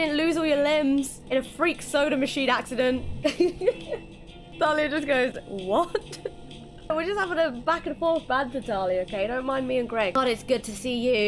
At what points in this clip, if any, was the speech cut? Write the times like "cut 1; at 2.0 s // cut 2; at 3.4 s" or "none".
cut 1; at 1.2 s // cut 2; at 3.1 s // cut 3; at 4.5 s // cut 4; at 6.9 s // cut 5; at 10.2 s